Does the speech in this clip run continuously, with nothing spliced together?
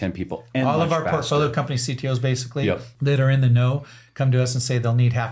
no; 1 cut; at 2.9 s

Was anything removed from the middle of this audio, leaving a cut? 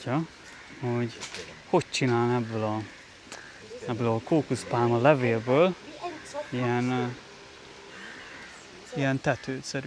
no; 0 cuts

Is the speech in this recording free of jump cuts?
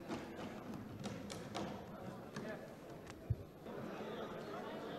no; 1 cut; at 3.7 s

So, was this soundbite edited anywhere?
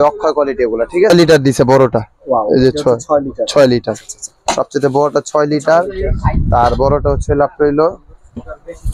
yes; 1 cut; at 1.1 s

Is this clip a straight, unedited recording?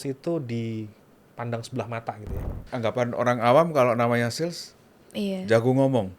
no; 1 cut; at 2.6 s

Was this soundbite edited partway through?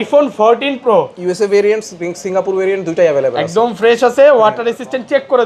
no; 0 cuts

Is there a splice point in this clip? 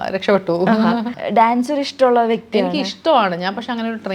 yes; 1 cut; at 1.2 s

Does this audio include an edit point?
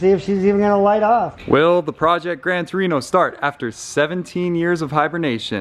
yes; 1 cut; at 1.4 s

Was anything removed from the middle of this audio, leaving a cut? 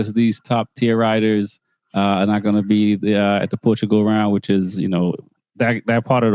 no; 0 cuts

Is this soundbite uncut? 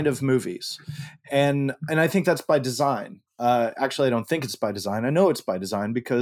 yes; 0 cuts

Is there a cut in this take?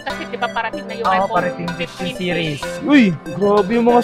yes; 1 cut; at 2.8 s

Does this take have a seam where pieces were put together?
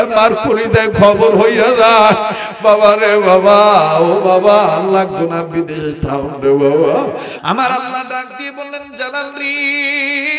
yes; 1 cut; at 7.3 s

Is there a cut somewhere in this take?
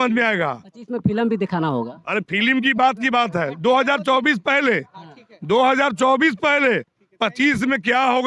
no; 0 cuts

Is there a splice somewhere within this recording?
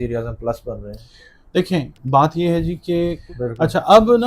yes; 1 cut; at 3.2 s

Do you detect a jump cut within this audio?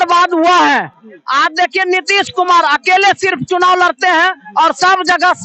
no; 0 cuts

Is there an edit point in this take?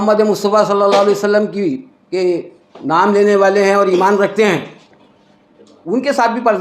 no; 0 cuts

